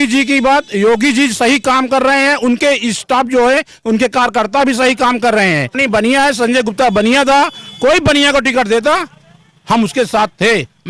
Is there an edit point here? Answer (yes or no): yes